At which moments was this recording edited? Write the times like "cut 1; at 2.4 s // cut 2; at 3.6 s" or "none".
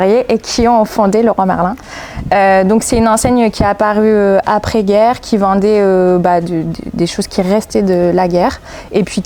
none